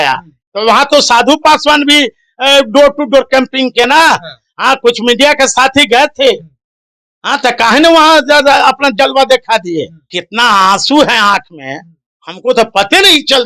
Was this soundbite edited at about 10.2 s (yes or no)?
yes